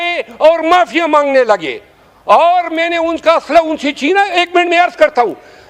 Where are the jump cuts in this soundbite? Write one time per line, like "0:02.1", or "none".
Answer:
none